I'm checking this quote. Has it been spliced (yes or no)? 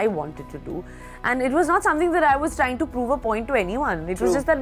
no